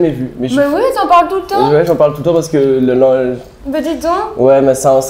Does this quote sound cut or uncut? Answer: uncut